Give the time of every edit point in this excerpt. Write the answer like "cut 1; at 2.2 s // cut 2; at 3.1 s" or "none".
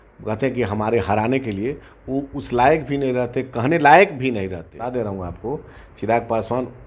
cut 1; at 4.8 s